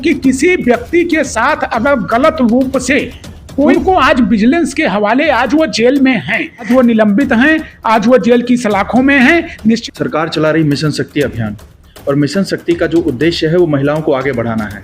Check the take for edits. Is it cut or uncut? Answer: cut